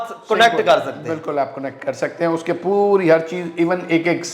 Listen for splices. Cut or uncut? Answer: uncut